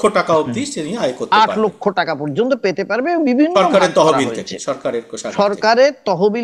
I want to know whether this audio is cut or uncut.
uncut